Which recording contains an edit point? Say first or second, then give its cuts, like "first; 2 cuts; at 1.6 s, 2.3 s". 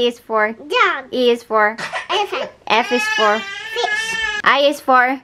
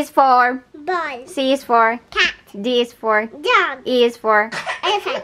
first; 1 cut; at 4.2 s